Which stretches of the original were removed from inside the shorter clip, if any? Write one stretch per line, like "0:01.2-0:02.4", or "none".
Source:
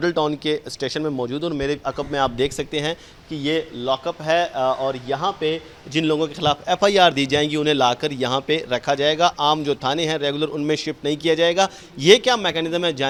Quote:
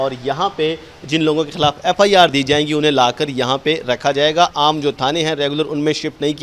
none